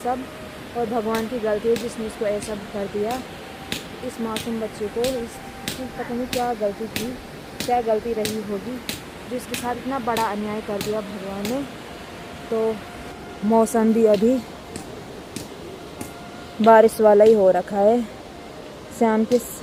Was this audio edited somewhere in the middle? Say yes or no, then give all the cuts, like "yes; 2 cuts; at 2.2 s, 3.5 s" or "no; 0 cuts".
no; 0 cuts